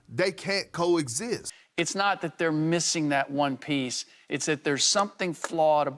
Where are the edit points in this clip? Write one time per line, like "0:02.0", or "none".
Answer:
0:01.6